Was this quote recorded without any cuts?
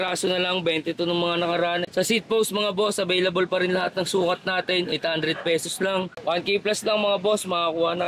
no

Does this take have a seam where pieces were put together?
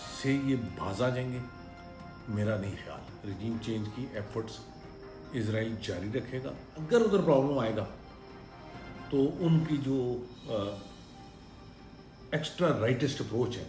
yes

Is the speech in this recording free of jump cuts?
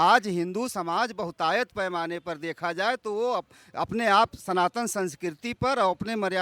yes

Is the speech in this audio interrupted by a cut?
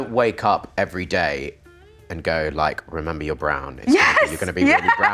no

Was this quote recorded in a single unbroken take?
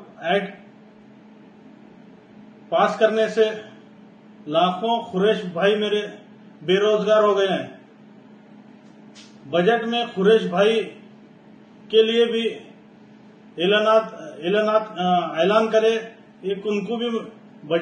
yes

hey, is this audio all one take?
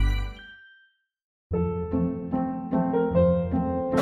no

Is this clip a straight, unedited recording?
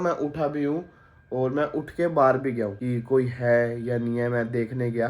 no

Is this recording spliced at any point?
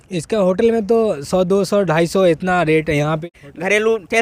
yes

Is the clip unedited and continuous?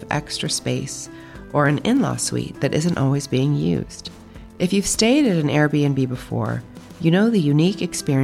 yes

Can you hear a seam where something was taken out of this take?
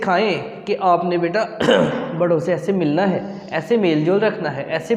no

